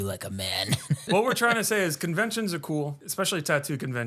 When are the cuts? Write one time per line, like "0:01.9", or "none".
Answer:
0:01.0
0:03.0